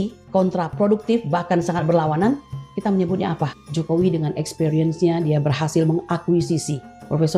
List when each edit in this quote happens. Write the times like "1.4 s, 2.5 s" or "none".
3.6 s